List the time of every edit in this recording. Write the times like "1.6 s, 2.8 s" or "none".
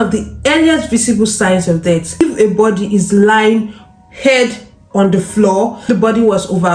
2.2 s, 5.9 s